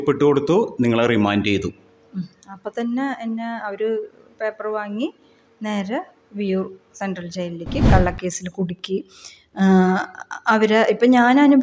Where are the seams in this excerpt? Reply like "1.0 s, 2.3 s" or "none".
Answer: 7.8 s